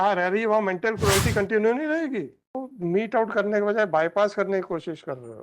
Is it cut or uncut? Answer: cut